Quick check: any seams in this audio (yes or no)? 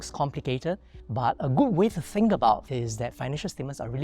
yes